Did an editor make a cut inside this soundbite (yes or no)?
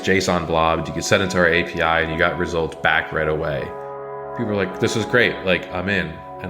yes